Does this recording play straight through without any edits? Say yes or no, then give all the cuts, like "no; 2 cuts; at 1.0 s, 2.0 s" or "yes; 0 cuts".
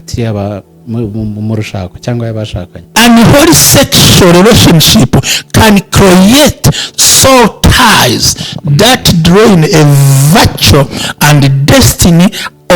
no; 1 cut; at 2.9 s